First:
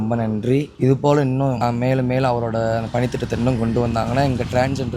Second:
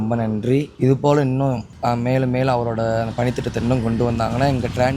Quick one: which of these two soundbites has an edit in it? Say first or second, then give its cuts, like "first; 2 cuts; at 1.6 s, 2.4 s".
first; 1 cut; at 1.6 s